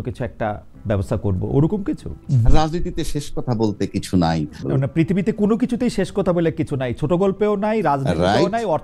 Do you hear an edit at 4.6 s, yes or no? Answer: yes